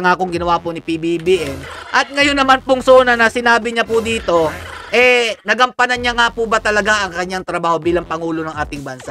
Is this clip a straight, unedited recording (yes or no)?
yes